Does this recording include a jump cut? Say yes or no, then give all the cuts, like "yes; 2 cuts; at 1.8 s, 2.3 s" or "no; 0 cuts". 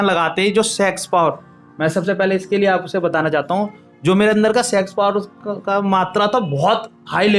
no; 0 cuts